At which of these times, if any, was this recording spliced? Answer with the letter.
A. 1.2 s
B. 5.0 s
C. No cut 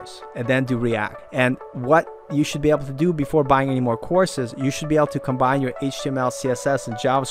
A